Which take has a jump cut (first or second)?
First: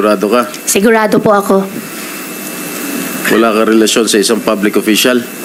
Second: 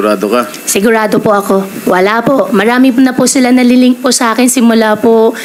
second